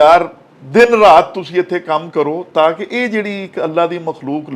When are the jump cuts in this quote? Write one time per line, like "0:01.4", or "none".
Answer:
none